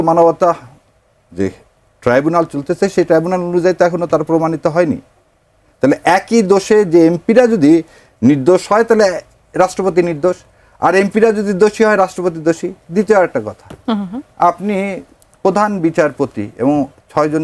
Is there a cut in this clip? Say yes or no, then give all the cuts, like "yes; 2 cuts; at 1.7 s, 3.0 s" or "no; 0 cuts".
no; 0 cuts